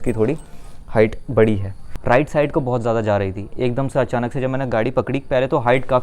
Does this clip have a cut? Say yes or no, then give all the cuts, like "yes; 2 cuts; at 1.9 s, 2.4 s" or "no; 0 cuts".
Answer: yes; 1 cut; at 1.9 s